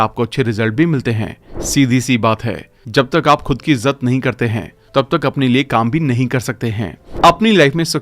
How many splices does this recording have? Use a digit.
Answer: 2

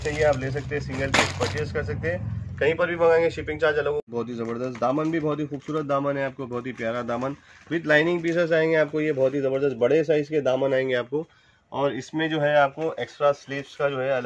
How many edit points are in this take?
1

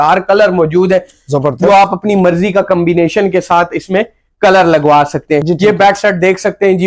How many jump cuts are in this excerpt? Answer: 1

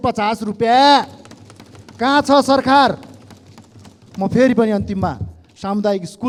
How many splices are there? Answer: 0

